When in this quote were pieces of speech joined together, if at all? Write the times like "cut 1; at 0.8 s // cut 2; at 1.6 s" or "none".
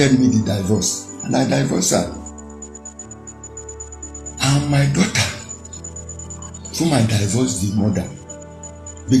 none

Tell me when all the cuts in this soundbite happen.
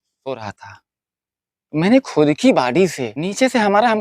cut 1; at 3.1 s

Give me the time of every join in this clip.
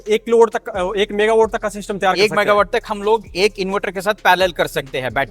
none

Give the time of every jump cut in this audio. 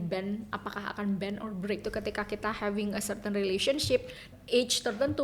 cut 1; at 1.9 s // cut 2; at 4.3 s

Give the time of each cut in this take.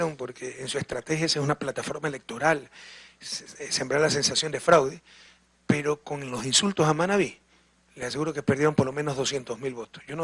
cut 1; at 7.6 s

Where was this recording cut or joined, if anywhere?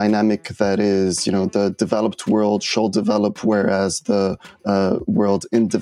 none

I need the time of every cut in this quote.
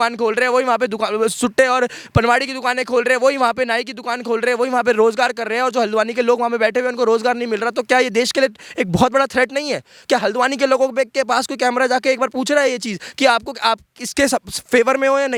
none

